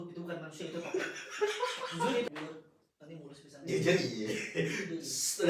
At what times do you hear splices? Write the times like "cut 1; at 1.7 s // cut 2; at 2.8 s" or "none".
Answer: cut 1; at 2.3 s